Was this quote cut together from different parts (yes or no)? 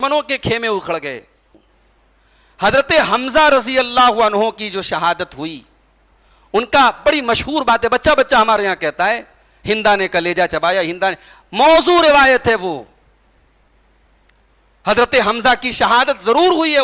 yes